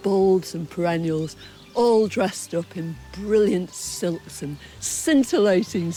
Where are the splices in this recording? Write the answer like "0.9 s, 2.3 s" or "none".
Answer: none